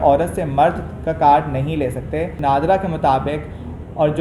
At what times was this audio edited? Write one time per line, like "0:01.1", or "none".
0:02.4